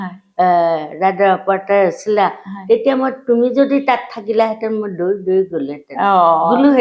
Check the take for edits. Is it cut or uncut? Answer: uncut